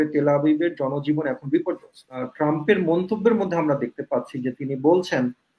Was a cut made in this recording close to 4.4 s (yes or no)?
no